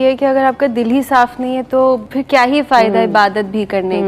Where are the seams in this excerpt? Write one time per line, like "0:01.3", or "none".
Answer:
0:02.1